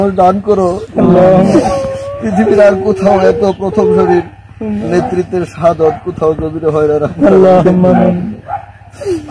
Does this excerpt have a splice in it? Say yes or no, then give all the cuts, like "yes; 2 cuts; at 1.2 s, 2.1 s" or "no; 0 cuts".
yes; 1 cut; at 1.5 s